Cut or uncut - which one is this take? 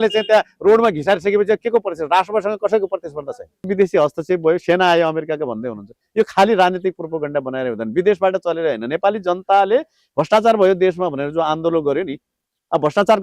cut